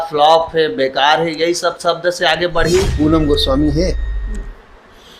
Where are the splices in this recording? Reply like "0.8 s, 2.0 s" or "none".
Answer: 2.9 s